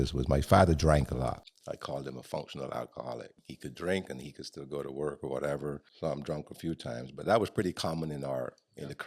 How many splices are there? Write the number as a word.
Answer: three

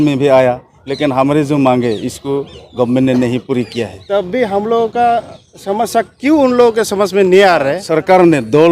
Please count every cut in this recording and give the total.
two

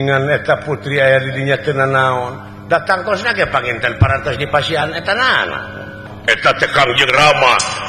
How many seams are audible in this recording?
one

